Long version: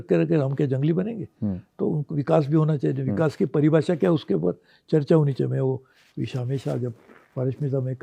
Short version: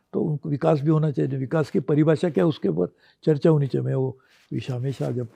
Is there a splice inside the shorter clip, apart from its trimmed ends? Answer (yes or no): no